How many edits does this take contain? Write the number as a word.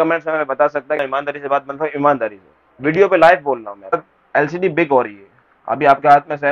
two